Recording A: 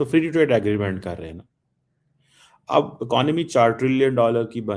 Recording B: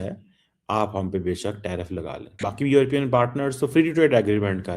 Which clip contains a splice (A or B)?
B